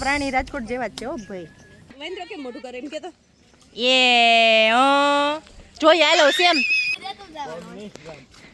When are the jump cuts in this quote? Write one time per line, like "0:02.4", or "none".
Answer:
none

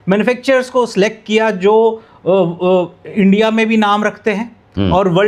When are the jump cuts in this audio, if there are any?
none

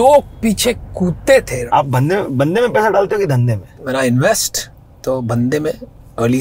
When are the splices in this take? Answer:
0:01.6
0:03.7

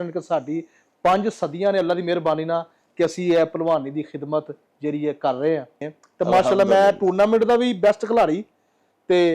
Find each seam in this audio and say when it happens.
0:05.7

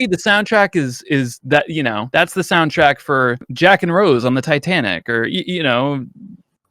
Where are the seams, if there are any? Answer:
0:02.0
0:03.5

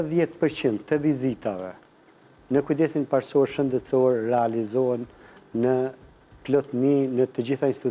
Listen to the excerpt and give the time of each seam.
none

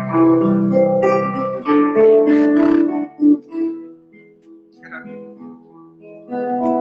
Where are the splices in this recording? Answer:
none

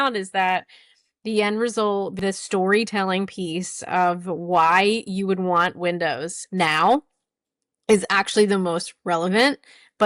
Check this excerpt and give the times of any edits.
0:02.1

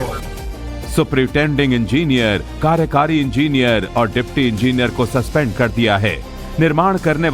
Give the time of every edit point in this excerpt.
none

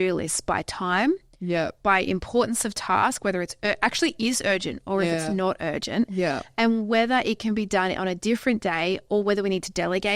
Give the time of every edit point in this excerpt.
none

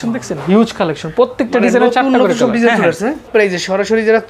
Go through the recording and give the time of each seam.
0:03.3

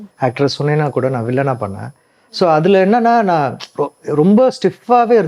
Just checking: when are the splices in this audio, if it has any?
none

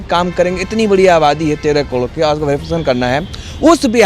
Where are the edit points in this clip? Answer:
none

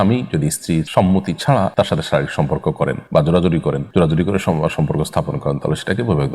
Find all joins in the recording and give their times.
0:00.9
0:01.7
0:03.0
0:03.8

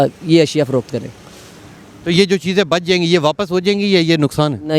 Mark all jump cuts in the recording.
none

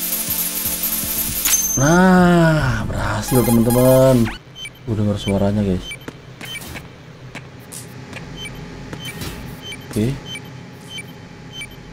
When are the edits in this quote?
0:04.3

